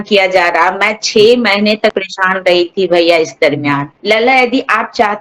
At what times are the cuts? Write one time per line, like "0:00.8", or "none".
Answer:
0:03.9